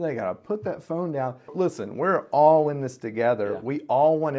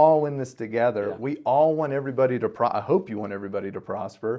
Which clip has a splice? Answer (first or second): first